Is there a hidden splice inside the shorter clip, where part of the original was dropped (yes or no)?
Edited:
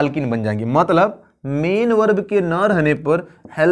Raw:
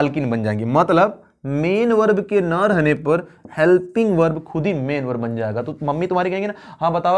no